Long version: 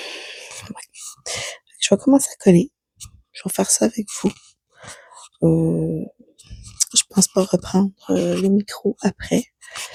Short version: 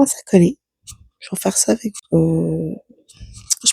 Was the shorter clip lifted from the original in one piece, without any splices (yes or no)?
no